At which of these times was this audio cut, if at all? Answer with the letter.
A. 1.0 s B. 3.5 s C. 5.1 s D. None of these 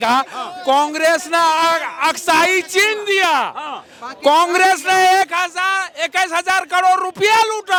D